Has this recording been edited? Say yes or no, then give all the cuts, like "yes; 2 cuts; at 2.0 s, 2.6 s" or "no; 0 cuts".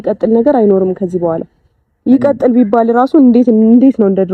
no; 0 cuts